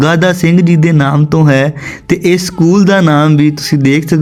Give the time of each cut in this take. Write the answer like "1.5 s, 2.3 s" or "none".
none